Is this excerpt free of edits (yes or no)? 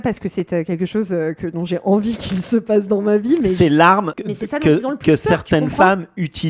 no